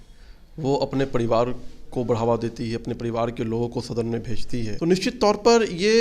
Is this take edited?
yes; 1 cut; at 4.7 s

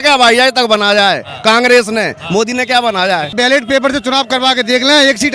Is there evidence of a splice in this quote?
yes; 1 cut; at 3.3 s

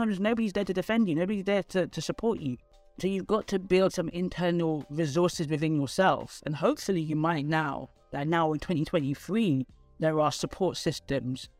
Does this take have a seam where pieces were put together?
no; 0 cuts

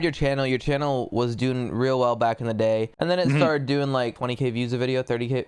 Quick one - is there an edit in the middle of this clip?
yes; 2 cuts; at 2.9 s, 4.2 s

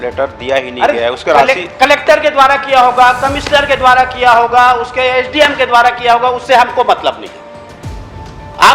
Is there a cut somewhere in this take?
no; 0 cuts

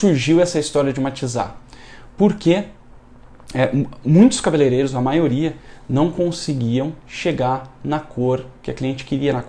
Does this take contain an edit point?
no; 0 cuts

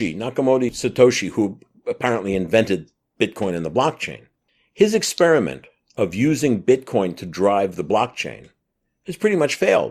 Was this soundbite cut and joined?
no; 0 cuts

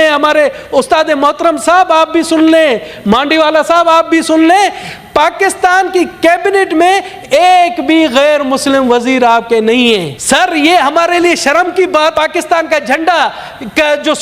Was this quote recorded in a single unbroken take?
no; 2 cuts; at 10.1 s, 12.1 s

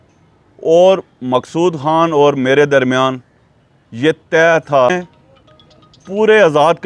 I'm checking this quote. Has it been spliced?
yes; 1 cut; at 4.9 s

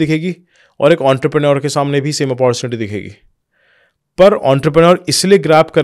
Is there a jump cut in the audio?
no; 0 cuts

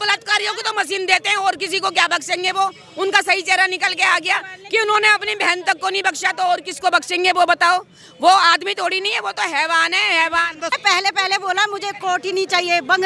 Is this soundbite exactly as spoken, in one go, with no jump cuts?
no; 1 cut; at 10.7 s

